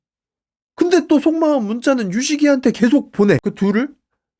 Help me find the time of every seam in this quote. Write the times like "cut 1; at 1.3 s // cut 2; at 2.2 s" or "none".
cut 1; at 3.4 s